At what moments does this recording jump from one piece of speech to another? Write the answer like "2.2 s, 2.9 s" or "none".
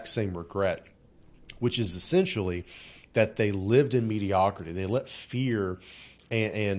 none